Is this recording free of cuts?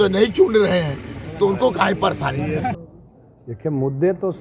no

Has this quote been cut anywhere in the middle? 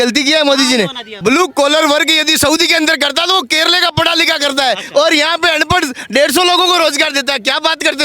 yes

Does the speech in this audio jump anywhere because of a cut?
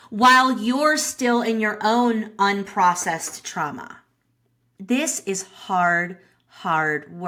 no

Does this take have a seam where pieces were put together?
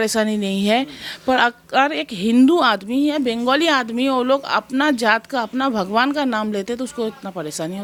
no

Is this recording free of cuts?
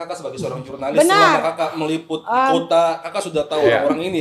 yes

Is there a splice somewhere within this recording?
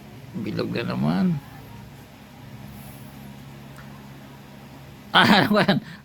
no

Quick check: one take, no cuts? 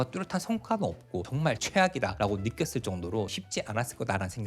no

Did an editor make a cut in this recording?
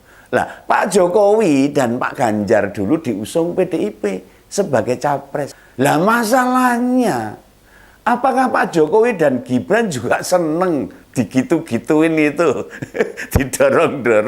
yes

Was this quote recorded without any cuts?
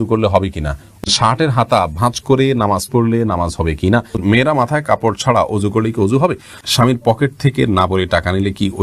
no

